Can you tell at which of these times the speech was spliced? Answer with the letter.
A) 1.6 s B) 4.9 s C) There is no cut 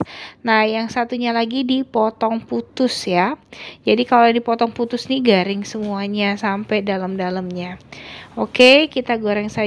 C